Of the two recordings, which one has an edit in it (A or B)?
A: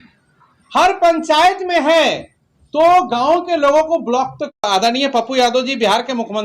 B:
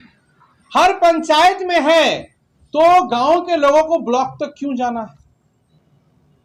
A